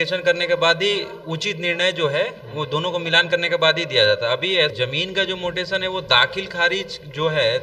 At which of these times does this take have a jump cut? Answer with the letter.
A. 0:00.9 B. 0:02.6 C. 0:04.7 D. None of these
C